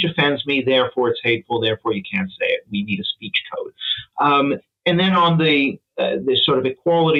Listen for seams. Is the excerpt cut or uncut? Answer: uncut